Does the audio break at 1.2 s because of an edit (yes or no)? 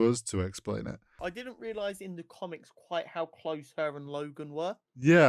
yes